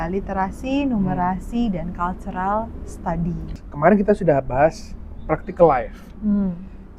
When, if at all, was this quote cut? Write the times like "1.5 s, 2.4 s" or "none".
3.5 s